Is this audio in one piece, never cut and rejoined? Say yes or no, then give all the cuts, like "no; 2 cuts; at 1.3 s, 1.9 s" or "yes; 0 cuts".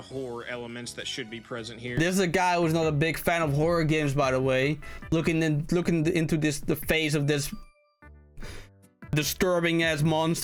yes; 0 cuts